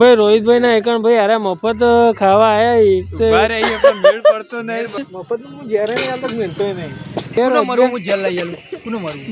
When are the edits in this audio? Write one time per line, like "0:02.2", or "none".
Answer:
0:05.1
0:07.3